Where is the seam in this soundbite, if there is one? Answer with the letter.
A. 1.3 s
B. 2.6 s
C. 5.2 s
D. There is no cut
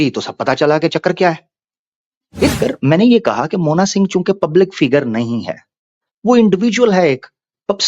B